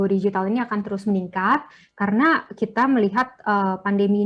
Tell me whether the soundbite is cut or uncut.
uncut